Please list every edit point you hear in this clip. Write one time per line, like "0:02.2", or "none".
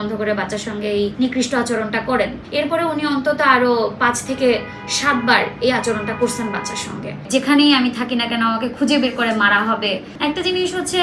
0:01.1
0:02.4
0:07.2
0:10.1